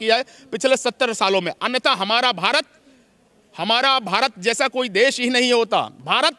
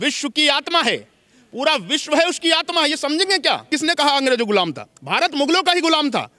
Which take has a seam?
second; 1 cut; at 3.7 s

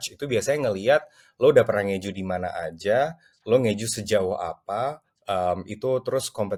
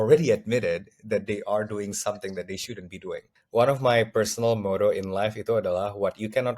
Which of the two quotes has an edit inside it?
second; 1 cut; at 3.3 s

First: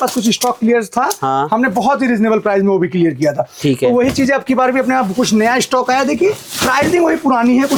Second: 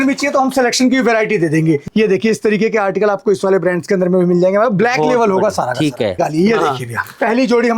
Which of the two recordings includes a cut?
second; 2 cuts; at 1.9 s, 6.2 s

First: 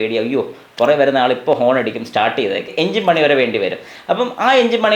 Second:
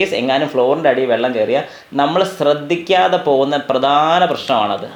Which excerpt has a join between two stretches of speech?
first; 1 cut; at 2.7 s

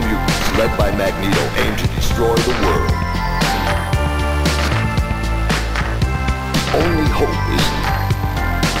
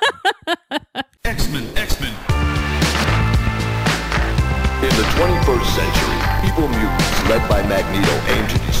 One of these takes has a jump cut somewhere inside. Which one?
second; 1 cut; at 1.1 s

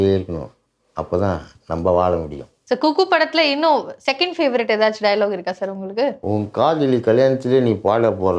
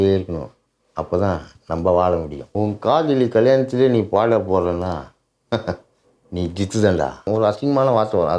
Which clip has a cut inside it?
second; 2 cuts; at 2.5 s, 7.3 s

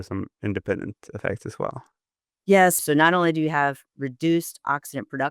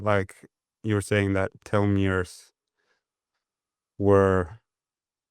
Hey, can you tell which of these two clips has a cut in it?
first; 1 cut; at 2.8 s

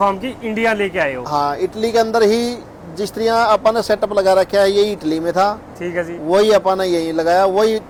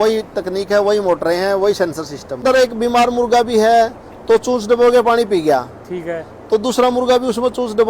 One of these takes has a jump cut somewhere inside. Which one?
second; 1 cut; at 2.4 s

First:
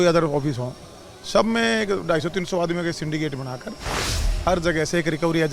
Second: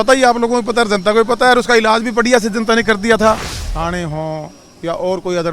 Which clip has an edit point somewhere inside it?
second; 1 cut; at 3.6 s

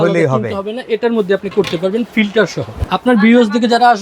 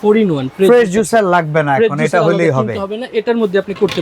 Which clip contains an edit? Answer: first; 1 cut; at 2.9 s

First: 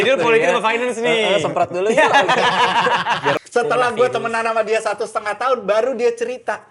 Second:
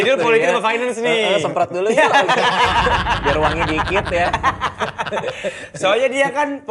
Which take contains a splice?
first; 1 cut; at 3.4 s

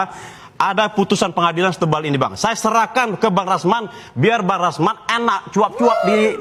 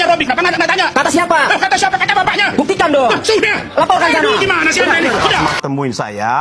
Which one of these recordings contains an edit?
second; 1 cut; at 5.2 s

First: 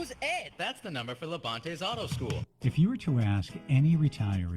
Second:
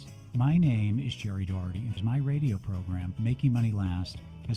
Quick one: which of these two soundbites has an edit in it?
first; 1 cut; at 2.5 s

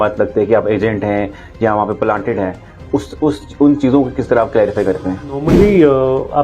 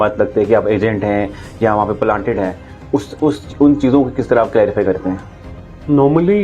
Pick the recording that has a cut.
first; 1 cut; at 5.5 s

